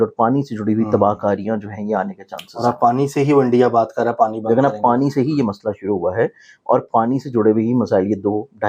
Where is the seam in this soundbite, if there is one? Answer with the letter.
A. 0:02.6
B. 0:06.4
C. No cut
C